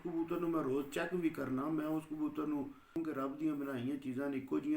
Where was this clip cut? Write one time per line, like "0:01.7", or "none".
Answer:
0:03.0